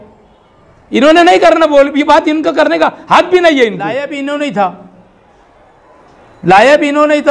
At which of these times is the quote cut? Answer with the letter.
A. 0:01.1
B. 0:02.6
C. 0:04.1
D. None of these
C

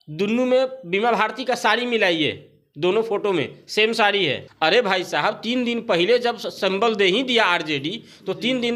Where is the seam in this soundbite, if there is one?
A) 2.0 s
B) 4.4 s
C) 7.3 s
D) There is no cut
B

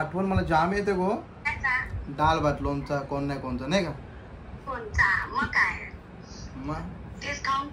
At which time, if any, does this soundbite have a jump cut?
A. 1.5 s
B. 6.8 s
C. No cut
A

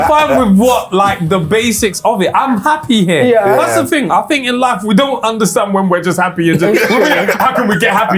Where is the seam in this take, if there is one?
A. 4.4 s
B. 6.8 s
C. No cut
C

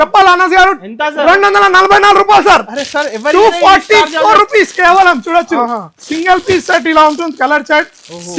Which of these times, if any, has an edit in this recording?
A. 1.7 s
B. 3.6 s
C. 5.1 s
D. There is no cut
D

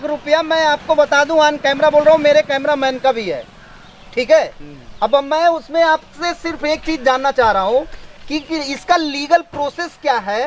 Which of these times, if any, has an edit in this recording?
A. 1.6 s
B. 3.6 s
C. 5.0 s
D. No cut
D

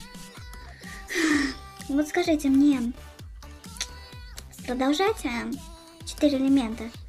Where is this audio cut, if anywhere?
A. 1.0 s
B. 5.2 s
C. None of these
B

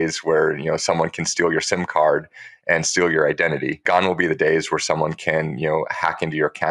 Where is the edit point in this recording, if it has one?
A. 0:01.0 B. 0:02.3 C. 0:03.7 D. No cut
C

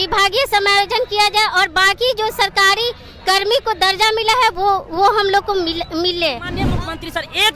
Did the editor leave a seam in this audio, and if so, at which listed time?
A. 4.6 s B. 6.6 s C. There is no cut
B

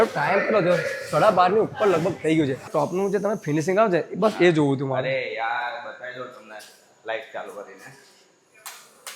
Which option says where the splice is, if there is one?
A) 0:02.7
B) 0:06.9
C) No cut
A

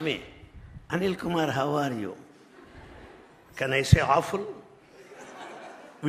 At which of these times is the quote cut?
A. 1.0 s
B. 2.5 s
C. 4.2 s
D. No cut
D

